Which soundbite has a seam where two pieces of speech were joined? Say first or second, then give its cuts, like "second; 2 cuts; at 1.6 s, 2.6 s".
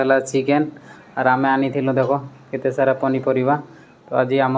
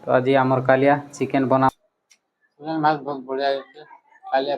second; 1 cut; at 1.7 s